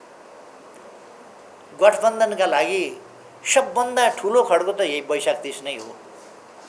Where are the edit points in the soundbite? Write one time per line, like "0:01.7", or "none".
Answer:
0:00.9